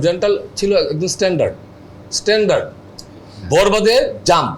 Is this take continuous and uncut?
yes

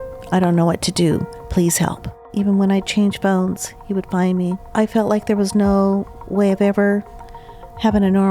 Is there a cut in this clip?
yes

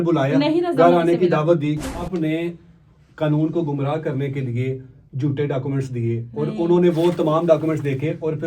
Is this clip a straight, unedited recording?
no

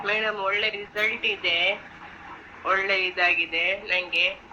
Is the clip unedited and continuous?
yes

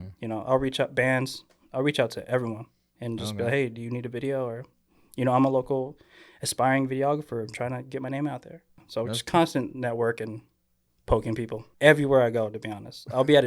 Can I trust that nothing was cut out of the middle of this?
no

